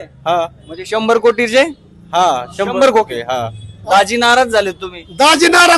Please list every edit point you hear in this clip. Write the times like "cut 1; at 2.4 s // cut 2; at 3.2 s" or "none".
cut 1; at 3.7 s

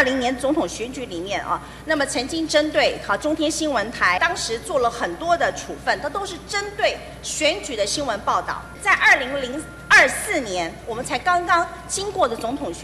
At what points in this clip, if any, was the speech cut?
cut 1; at 4.2 s // cut 2; at 8.7 s

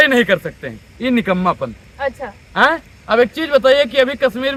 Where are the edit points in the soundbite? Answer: none

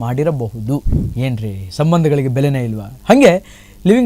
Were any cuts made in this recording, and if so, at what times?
cut 1; at 1.0 s

